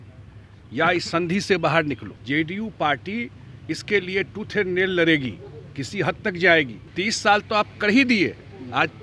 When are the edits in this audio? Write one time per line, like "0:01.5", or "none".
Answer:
0:02.1
0:06.9